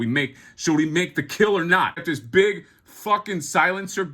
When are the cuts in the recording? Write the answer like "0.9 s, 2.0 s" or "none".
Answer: 2.0 s